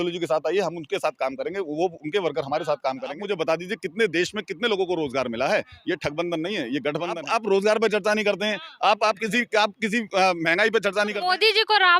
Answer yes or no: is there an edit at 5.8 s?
no